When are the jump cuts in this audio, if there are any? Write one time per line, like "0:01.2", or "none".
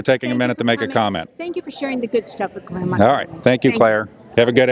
none